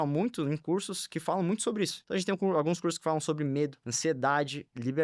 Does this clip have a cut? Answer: yes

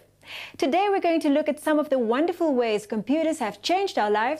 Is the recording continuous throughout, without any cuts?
no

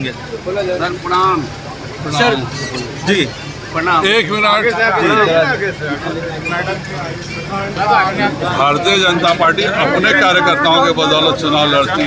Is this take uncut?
yes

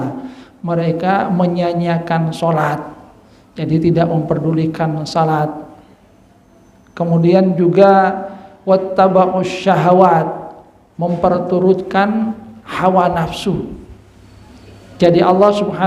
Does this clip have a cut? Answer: no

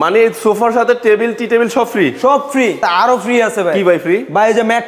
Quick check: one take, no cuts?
no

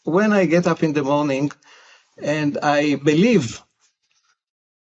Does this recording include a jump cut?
no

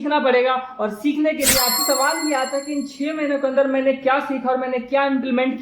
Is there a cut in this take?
yes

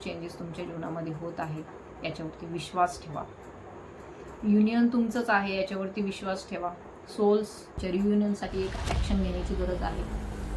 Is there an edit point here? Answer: yes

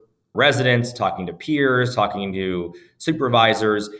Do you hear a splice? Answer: no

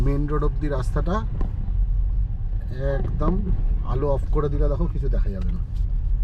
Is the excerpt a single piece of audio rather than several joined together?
yes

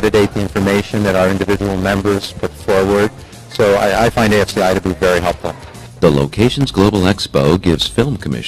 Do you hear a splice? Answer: yes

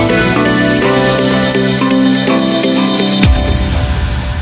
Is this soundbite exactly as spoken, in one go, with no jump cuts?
no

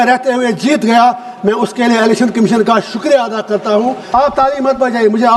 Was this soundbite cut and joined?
yes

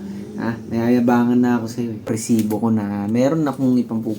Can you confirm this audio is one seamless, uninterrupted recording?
no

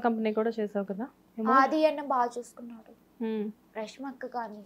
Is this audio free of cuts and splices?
yes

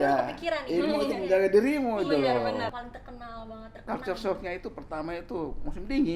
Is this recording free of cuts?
no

